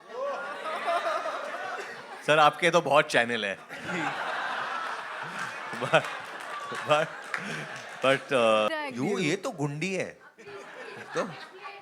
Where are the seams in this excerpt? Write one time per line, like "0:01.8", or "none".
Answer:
0:08.7